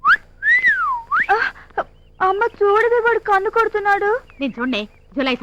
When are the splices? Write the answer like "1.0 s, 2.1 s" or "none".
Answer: none